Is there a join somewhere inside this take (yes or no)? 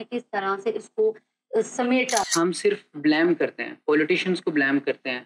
yes